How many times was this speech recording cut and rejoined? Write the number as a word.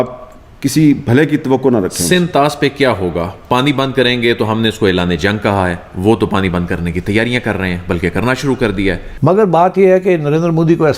one